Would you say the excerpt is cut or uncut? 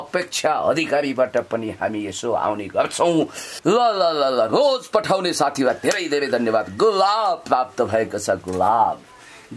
cut